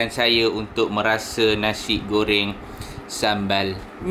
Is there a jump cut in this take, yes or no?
no